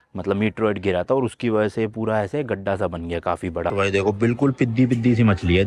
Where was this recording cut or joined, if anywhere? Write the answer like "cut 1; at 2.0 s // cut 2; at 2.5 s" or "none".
cut 1; at 3.7 s